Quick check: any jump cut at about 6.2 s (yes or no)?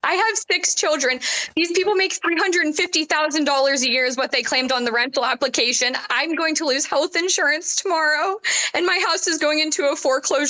no